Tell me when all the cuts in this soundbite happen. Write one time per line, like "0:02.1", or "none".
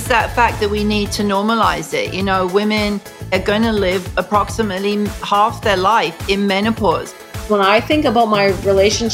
0:03.3
0:07.1